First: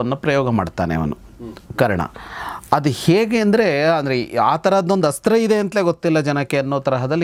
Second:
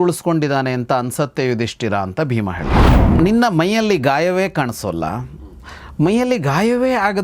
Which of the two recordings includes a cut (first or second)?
second